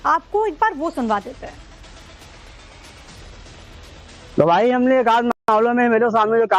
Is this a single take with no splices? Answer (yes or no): yes